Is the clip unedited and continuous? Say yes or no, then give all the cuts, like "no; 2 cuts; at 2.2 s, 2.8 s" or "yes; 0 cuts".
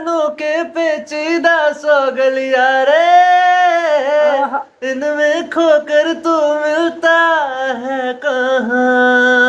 yes; 0 cuts